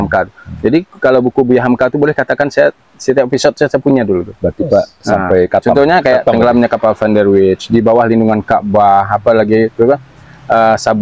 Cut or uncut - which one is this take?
uncut